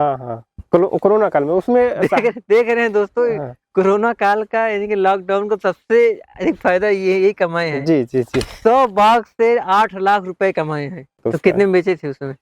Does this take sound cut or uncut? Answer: cut